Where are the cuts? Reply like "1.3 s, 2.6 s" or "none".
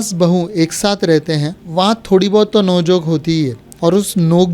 1.6 s, 3.6 s